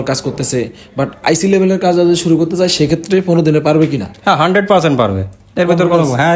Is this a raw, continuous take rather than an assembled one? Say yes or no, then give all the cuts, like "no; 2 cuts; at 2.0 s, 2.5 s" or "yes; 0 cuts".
yes; 0 cuts